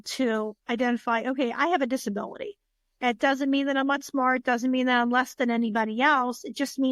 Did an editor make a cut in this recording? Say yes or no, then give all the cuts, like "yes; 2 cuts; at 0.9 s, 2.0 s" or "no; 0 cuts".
no; 0 cuts